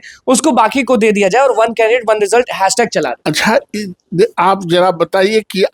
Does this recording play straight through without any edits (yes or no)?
no